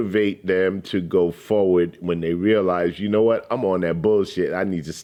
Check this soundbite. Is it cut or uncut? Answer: uncut